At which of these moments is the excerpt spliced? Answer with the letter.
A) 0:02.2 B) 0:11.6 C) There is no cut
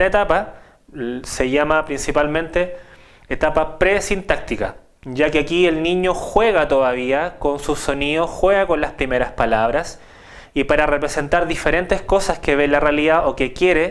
A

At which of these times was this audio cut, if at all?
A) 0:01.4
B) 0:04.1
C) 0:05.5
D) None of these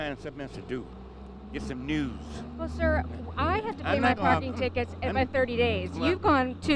C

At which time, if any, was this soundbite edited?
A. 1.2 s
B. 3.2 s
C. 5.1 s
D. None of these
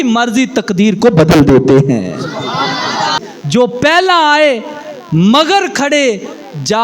B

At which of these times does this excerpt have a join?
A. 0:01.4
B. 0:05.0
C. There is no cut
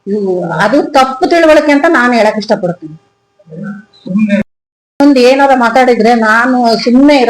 B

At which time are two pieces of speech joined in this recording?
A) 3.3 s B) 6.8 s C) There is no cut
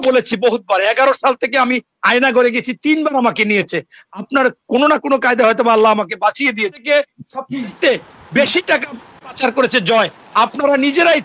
B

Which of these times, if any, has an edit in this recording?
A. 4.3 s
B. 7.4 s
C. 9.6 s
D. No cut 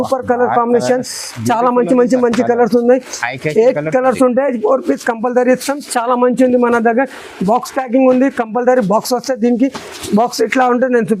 D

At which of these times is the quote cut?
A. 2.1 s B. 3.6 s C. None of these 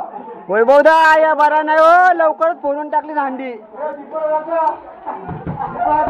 B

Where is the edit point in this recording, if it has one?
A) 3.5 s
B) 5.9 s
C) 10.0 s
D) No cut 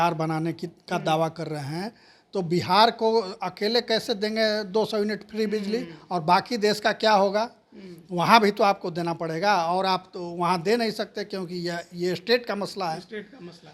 D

